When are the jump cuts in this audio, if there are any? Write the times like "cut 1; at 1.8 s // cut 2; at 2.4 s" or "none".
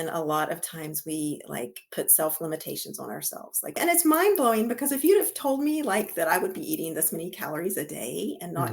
cut 1; at 3.8 s